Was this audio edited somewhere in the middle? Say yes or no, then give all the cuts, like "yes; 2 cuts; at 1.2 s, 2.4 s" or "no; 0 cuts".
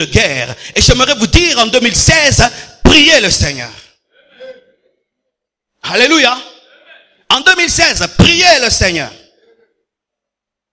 no; 0 cuts